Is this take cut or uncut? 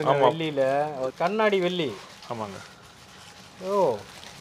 cut